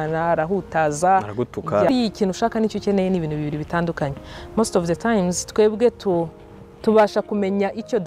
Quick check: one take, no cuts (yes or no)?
no